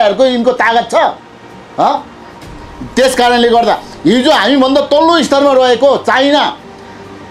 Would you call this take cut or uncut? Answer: uncut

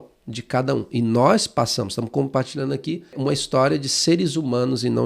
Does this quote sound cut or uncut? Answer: cut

